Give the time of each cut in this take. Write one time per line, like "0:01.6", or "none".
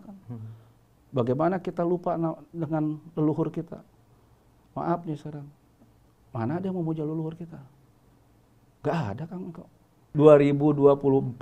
0:10.0